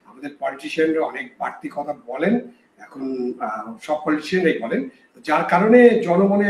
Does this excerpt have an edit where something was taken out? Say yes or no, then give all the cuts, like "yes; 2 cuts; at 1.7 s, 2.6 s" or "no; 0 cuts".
no; 0 cuts